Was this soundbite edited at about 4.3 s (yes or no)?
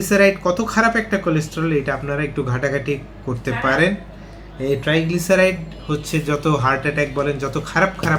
no